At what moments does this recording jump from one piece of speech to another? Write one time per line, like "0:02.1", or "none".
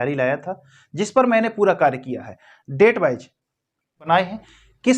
0:04.1